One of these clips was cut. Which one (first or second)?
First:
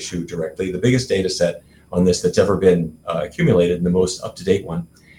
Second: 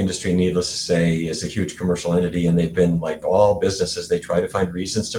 second